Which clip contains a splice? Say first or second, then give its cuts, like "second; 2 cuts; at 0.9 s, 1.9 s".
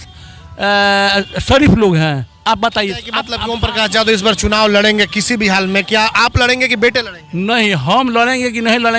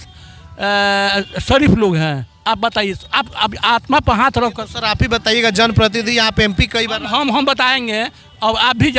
first; 1 cut; at 3.3 s